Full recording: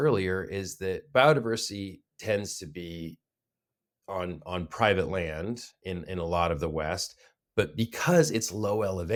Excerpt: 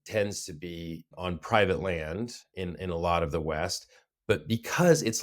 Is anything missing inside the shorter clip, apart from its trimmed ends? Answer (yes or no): yes